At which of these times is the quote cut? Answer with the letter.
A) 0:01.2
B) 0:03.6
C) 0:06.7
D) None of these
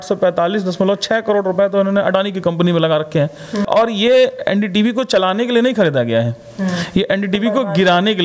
B